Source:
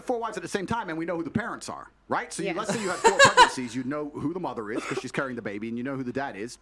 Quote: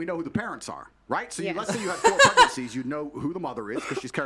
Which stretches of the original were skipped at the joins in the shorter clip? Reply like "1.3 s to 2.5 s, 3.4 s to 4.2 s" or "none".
none